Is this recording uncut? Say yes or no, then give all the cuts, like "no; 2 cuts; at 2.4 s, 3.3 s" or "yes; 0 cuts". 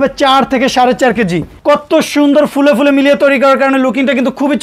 no; 1 cut; at 1.5 s